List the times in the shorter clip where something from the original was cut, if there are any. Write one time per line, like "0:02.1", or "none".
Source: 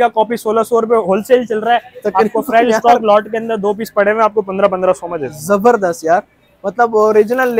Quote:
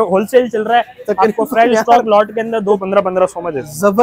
0:02.7